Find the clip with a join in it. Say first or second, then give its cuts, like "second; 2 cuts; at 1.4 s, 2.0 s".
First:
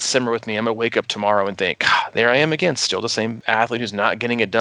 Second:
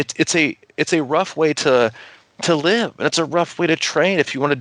first; 1 cut; at 3.4 s